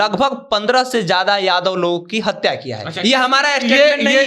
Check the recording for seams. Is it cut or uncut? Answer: uncut